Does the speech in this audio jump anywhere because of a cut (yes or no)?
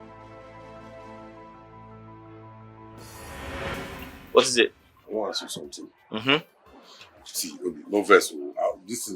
yes